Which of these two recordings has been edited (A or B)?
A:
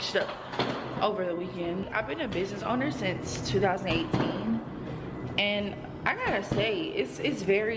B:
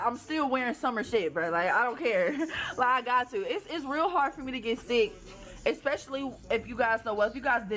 B